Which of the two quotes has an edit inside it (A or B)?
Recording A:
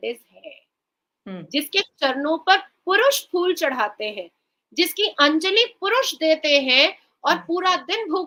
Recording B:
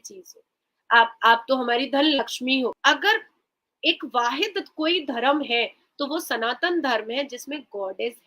B